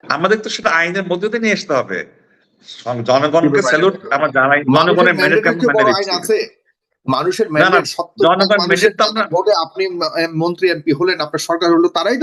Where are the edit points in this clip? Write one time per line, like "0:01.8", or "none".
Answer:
none